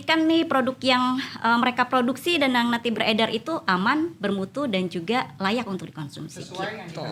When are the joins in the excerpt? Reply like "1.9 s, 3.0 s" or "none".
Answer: none

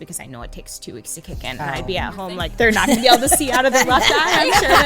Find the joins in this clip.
2.5 s

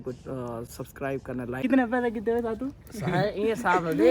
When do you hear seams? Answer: 1.6 s

